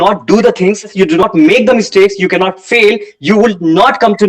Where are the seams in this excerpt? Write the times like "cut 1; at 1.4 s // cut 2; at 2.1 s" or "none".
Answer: cut 1; at 1.2 s